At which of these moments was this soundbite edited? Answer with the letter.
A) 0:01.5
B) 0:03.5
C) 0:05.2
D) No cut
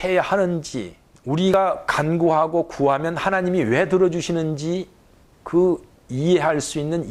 A